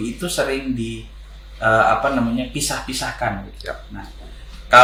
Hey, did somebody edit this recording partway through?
no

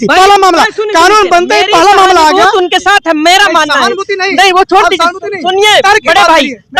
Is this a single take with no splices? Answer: yes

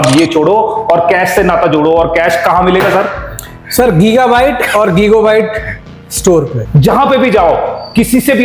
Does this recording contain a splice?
yes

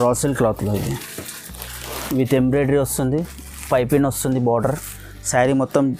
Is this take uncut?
yes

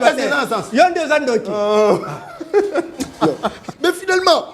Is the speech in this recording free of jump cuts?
no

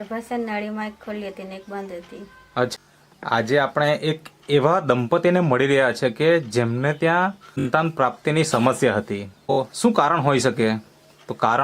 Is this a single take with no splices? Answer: no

